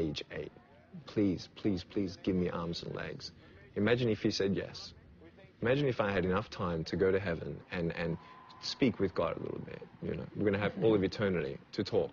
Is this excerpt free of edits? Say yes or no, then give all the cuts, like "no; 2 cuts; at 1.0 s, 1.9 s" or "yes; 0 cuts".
yes; 0 cuts